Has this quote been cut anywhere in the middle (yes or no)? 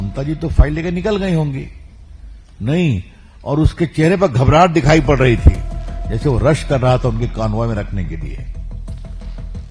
yes